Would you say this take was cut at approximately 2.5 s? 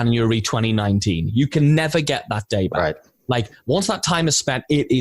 no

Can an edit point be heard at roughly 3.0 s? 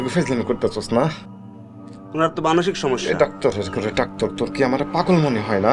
yes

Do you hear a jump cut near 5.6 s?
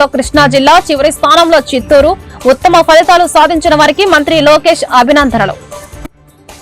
yes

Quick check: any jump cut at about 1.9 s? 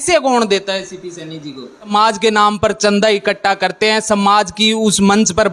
yes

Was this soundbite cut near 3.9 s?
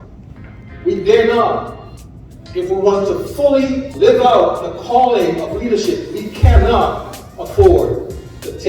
yes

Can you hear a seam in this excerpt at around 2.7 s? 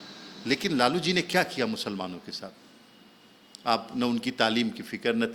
no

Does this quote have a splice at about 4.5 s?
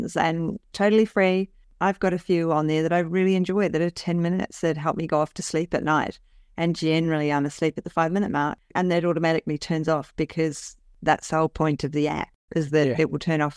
no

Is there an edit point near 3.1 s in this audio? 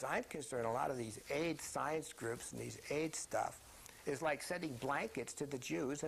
yes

